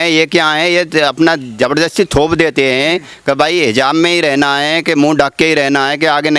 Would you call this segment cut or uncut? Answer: uncut